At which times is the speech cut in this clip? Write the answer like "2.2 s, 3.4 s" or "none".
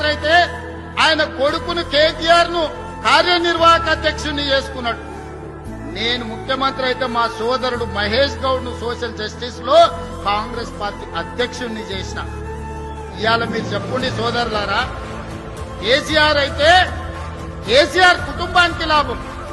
none